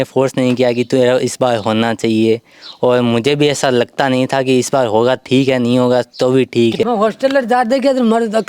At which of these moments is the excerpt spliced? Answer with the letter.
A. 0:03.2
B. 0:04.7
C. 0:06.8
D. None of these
C